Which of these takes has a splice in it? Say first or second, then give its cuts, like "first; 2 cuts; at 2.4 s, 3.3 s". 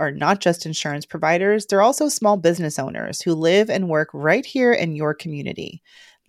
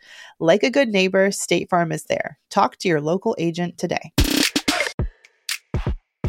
second; 1 cut; at 5.0 s